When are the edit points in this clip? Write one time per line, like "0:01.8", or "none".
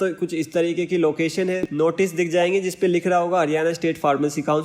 0:01.7